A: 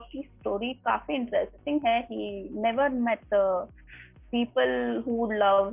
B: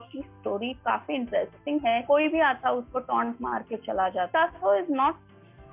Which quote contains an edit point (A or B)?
B